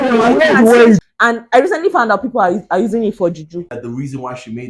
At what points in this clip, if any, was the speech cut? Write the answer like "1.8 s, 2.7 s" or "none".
1.0 s, 3.7 s